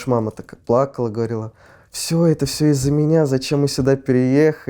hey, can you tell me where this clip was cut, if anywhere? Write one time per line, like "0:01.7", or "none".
none